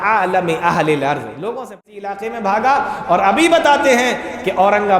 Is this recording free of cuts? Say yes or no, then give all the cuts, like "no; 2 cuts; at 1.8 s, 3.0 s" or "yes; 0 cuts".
no; 1 cut; at 1.7 s